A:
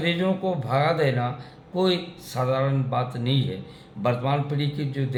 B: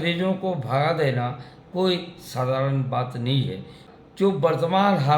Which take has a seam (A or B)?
B